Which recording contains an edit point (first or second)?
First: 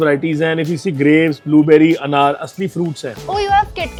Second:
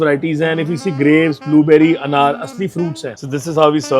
second